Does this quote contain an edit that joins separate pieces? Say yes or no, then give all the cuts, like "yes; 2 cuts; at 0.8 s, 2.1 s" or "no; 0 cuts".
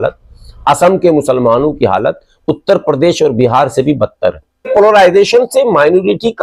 yes; 1 cut; at 4.7 s